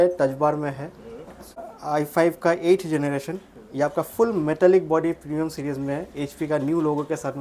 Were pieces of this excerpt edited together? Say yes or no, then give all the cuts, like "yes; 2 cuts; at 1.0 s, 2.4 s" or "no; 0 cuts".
yes; 1 cut; at 1.7 s